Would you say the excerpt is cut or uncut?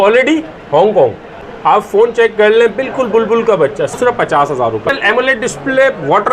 cut